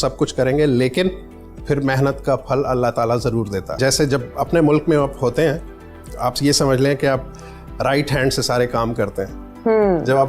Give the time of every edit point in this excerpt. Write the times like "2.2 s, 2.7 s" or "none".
3.8 s